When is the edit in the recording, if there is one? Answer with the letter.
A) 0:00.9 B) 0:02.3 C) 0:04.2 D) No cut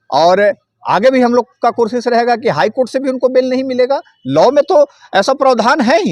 D